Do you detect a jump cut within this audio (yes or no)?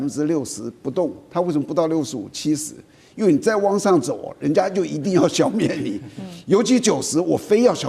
no